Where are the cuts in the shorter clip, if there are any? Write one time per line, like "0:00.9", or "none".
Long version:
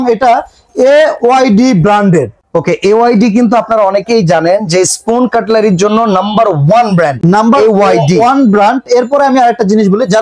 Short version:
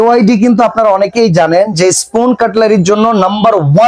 none